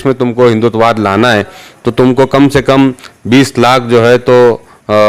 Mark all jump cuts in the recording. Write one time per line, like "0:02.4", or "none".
none